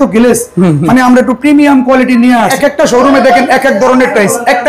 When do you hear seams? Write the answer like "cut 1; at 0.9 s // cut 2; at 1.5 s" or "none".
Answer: cut 1; at 2.5 s